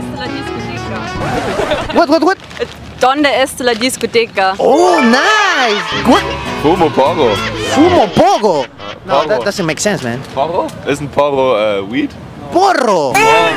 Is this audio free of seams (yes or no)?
no